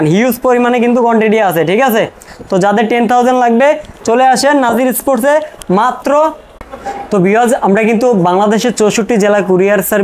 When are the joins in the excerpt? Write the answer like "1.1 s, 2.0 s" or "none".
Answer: none